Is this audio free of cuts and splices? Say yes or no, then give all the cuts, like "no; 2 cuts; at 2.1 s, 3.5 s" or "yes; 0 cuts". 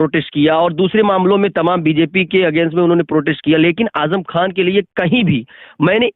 yes; 0 cuts